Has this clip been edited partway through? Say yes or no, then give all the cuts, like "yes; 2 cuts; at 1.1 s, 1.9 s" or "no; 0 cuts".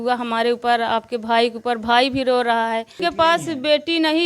yes; 1 cut; at 3.0 s